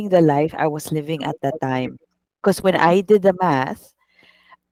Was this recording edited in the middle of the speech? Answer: no; 0 cuts

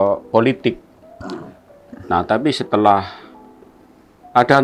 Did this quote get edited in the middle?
no; 0 cuts

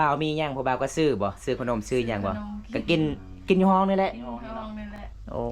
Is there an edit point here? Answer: no; 0 cuts

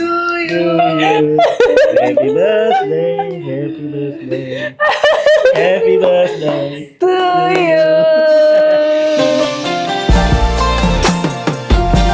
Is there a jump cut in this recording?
no; 0 cuts

